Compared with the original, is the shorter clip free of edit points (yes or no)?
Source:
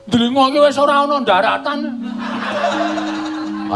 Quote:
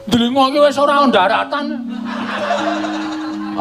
no